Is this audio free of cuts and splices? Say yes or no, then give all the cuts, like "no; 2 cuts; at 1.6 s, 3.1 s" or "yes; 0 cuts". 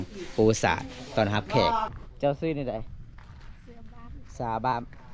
no; 1 cut; at 2.0 s